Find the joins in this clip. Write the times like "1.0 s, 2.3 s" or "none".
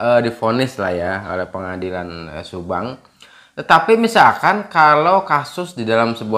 none